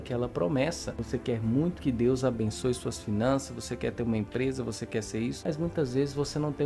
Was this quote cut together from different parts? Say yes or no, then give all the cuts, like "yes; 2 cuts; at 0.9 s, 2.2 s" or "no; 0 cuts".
yes; 2 cuts; at 1.0 s, 5.4 s